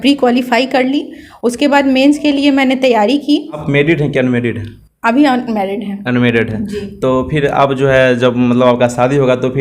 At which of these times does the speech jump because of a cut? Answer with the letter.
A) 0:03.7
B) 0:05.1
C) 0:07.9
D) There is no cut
A